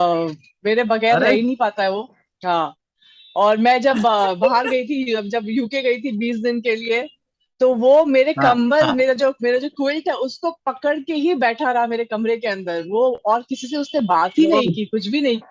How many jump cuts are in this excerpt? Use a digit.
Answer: 0